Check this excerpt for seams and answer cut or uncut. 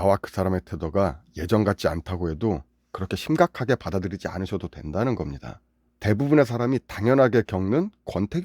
uncut